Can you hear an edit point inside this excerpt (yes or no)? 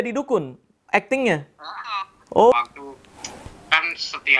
yes